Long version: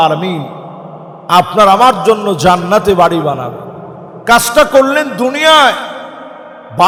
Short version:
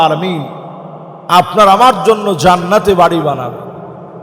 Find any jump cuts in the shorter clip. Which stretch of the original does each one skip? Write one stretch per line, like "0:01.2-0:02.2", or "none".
none

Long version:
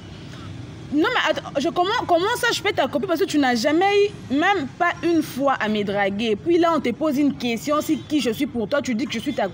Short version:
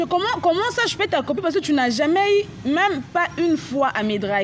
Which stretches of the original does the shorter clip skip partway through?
none

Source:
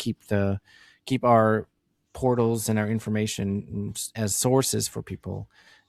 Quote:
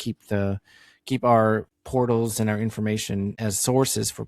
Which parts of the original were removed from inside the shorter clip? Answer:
0:01.8-0:02.0
0:03.6-0:04.1

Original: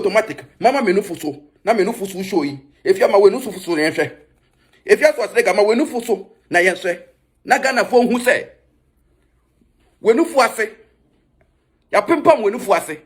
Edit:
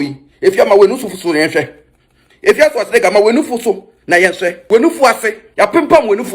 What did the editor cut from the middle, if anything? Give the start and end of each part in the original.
0:07.0-0:09.9
0:10.8-0:11.8

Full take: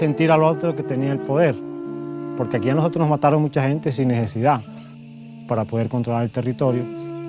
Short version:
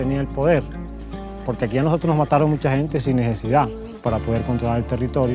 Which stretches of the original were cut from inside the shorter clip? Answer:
0:04.8-0:05.3

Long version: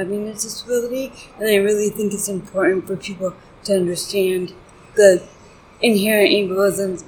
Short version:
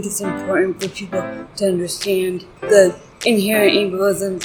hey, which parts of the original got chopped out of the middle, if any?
0:04.6-0:04.8
0:05.3-0:05.6

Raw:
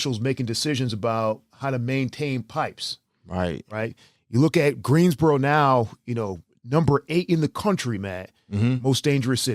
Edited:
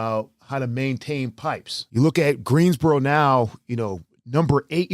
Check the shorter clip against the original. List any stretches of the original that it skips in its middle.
0:02.9-0:04.1

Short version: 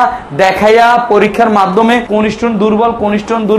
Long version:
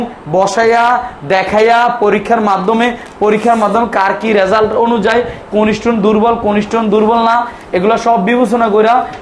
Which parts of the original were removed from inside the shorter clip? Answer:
0:03.0-0:05.5

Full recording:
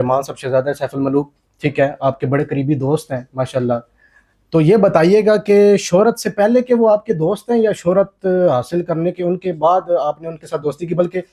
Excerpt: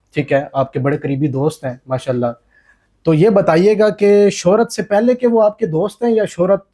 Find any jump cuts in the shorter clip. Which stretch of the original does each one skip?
none

